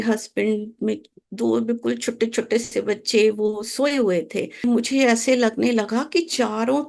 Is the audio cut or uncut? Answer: cut